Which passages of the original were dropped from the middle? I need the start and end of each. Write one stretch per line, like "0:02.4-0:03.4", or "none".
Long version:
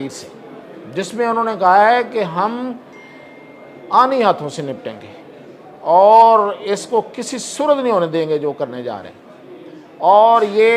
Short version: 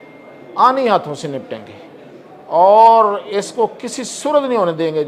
none